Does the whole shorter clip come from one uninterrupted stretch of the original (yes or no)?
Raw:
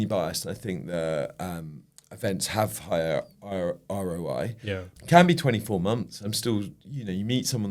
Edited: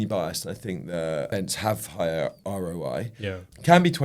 no